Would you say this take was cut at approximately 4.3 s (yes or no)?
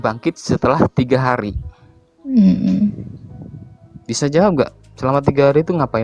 no